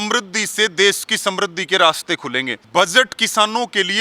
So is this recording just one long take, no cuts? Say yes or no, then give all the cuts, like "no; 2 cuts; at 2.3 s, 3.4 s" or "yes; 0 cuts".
no; 1 cut; at 2.6 s